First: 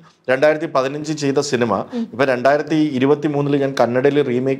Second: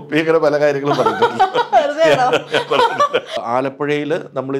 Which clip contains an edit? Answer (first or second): second